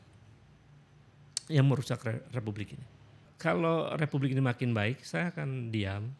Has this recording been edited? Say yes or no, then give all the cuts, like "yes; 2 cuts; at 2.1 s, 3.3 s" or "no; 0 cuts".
yes; 1 cut; at 3.3 s